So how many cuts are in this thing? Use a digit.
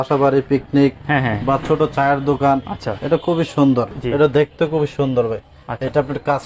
1